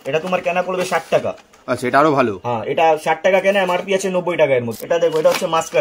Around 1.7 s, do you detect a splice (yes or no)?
no